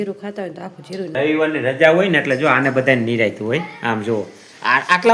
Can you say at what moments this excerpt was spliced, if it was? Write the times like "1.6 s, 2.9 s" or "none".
1.1 s